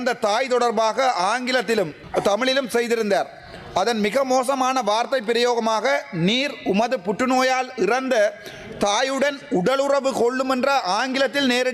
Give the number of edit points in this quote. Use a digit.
1